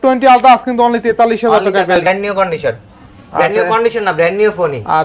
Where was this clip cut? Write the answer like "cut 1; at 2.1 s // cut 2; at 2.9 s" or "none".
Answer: cut 1; at 2.0 s